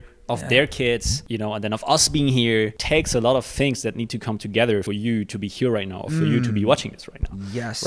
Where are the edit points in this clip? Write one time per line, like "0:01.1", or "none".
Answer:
0:01.2
0:02.8
0:04.9